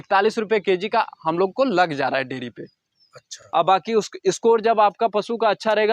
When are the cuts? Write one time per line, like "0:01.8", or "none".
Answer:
0:03.3